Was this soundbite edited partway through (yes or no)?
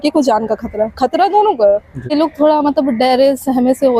yes